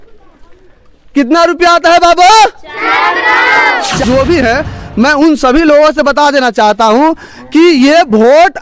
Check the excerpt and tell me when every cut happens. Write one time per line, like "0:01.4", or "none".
0:04.0